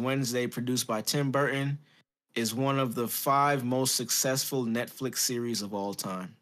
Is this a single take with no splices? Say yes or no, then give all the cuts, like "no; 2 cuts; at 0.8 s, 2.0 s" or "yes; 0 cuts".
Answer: yes; 0 cuts